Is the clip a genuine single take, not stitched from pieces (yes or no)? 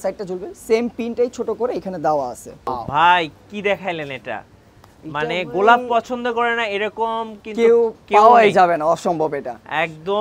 no